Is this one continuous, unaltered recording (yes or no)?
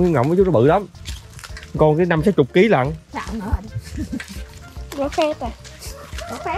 yes